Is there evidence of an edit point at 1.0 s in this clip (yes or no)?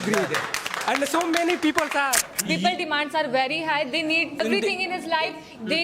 no